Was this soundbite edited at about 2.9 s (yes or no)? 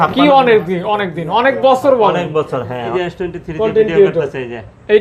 yes